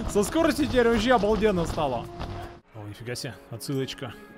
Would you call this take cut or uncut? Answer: cut